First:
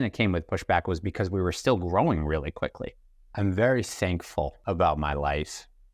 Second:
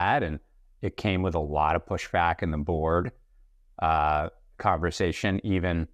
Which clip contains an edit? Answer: first; 2 cuts; at 2.8 s, 4.6 s

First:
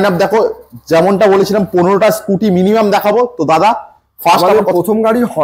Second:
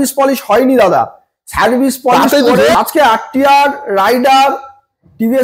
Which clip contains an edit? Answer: second; 1 cut; at 2.7 s

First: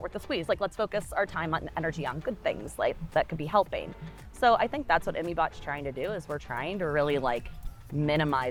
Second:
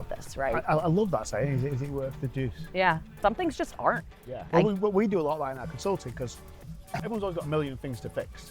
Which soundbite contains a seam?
second; 3 cuts; at 3.2 s, 4.5 s, 7.0 s

